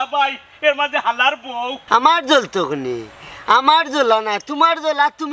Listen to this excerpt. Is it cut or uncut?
cut